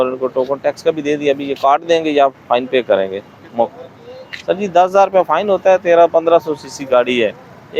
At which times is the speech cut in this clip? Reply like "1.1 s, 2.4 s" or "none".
none